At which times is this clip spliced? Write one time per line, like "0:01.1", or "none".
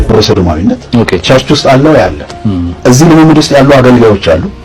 0:00.8
0:02.7